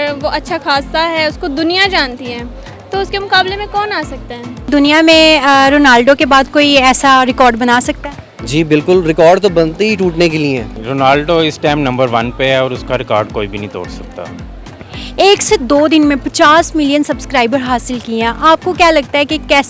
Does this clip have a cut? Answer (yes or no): yes